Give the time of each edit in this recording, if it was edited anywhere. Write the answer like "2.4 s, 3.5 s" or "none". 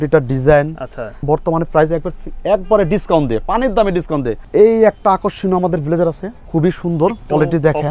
1.2 s, 4.4 s, 6.3 s